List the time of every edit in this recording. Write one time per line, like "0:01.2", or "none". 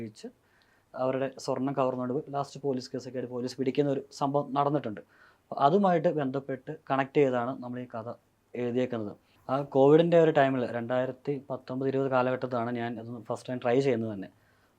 0:09.3